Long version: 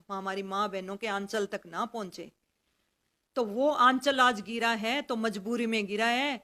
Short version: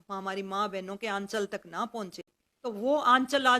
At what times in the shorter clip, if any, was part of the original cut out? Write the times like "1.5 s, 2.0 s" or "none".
2.4 s